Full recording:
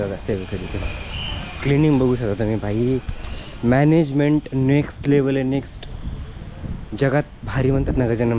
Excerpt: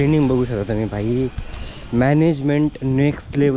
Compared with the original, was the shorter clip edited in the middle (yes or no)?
no